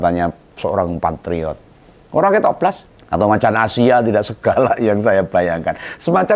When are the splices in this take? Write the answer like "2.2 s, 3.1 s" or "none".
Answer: 2.9 s

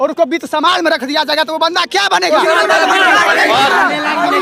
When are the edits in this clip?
none

